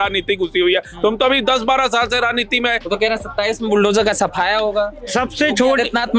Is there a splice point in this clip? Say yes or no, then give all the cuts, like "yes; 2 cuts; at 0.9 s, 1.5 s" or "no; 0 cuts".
yes; 1 cut; at 2.8 s